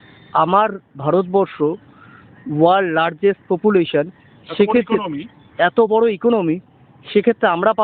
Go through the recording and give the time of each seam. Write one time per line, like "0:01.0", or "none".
none